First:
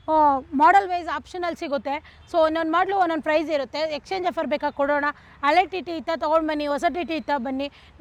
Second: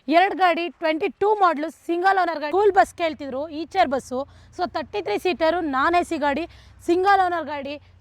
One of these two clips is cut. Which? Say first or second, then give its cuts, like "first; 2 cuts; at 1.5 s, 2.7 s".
second; 1 cut; at 2.4 s